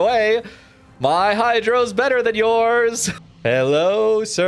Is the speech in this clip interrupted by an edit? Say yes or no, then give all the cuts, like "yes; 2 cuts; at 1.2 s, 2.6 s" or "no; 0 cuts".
yes; 1 cut; at 3.1 s